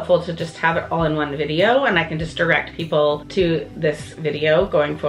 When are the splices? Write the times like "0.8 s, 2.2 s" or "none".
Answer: 3.2 s